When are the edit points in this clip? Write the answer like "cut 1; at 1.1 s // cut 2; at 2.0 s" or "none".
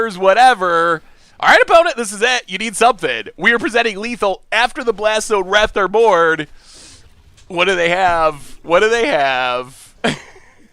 cut 1; at 9.8 s

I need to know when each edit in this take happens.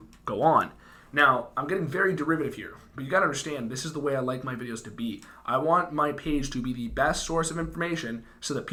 none

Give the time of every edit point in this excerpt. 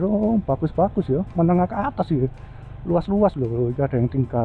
none

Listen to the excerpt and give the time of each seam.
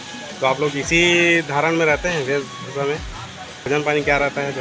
cut 1; at 3.7 s

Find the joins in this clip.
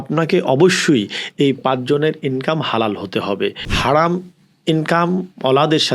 cut 1; at 3.7 s

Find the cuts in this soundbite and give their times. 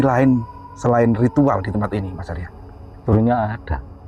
cut 1; at 3.0 s

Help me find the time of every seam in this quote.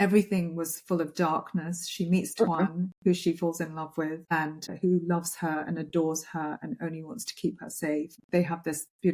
cut 1; at 4.7 s // cut 2; at 8.2 s

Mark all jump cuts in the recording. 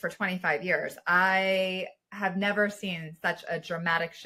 none

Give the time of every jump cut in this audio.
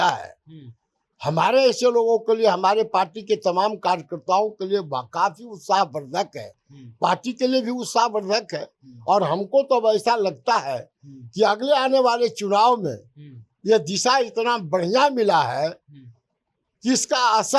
none

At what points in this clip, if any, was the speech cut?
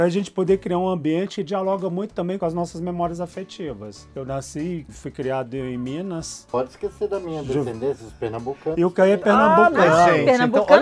cut 1; at 1.4 s // cut 2; at 2.4 s // cut 3; at 6.4 s

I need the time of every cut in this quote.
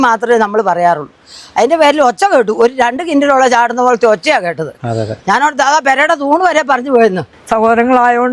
cut 1; at 7.3 s

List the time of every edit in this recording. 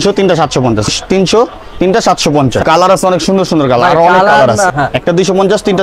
cut 1; at 0.9 s // cut 2; at 2.6 s // cut 3; at 4.7 s

